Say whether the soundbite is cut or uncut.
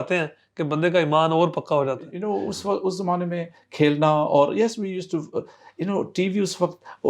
cut